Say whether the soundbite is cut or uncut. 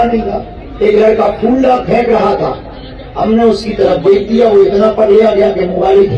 uncut